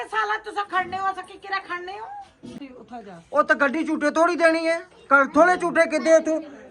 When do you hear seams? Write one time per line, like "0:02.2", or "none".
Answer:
0:02.7

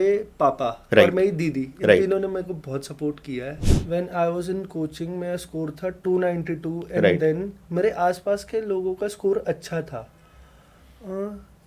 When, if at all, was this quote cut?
0:03.7

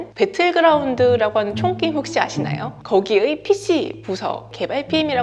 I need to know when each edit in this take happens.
none

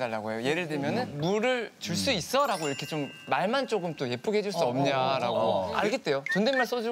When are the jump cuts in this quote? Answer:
0:01.1
0:05.7

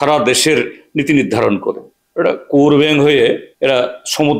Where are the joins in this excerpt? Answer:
0:02.0
0:03.5

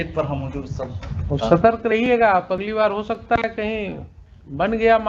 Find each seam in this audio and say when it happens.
none

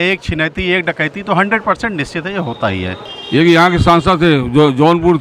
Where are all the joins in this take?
0:03.1

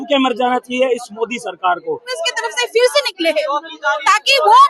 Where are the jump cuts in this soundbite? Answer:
0:02.1

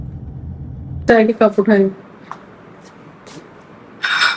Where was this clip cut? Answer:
0:01.1

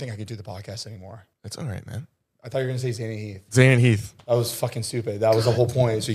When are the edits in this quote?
0:01.3

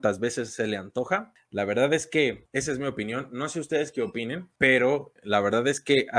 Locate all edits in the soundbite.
0:01.4
0:02.4
0:04.5
0:05.1

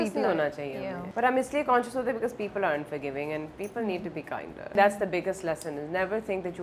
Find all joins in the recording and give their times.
0:01.0
0:04.7

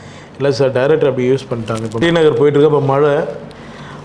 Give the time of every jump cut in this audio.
0:02.0

